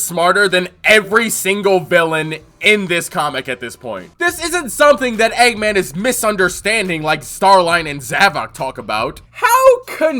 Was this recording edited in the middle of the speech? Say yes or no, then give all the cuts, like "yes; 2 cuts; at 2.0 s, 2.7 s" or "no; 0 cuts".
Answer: yes; 2 cuts; at 4.0 s, 9.2 s